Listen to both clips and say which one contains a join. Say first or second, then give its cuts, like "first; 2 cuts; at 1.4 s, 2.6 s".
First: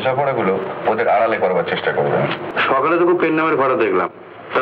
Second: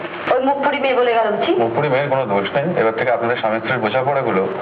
first; 1 cut; at 2.4 s